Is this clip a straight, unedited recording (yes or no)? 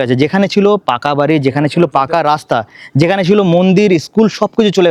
yes